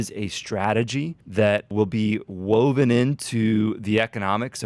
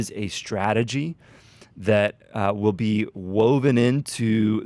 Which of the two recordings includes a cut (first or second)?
first